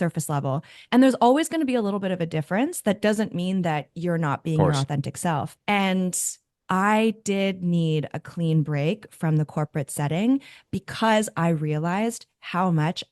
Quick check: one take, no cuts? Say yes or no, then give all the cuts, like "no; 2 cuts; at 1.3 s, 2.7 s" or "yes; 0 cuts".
no; 2 cuts; at 5.6 s, 6.5 s